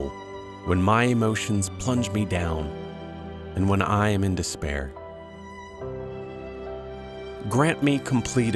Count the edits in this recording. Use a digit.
2